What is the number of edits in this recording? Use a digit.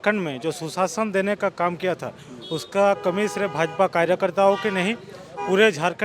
0